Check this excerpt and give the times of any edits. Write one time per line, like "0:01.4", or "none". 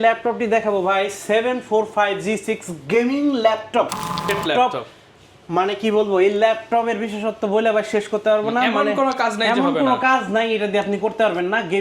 0:04.3